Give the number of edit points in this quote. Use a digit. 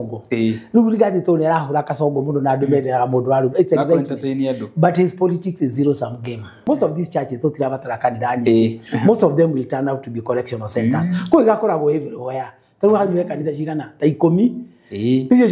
1